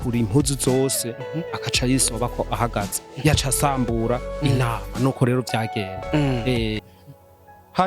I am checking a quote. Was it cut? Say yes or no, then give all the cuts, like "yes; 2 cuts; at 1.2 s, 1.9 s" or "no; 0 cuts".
yes; 1 cut; at 6.8 s